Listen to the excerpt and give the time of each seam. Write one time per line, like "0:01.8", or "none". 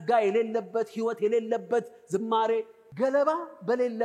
0:02.8